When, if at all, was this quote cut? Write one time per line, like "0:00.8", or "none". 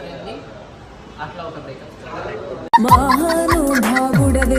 none